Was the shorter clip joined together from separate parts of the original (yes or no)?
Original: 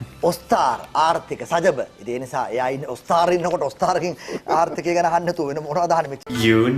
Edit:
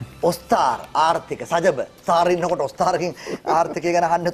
yes